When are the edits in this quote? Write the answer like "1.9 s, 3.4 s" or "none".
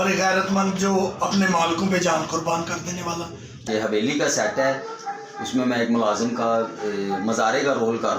3.6 s